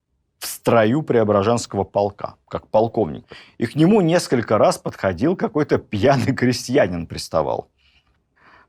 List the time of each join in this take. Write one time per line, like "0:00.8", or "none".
none